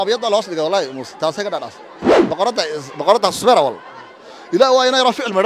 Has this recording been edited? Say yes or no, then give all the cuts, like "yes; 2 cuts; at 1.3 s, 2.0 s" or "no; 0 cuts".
yes; 1 cut; at 2.1 s